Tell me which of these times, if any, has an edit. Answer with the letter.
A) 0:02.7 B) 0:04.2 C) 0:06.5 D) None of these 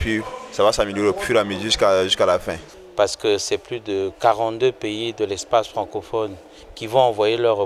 A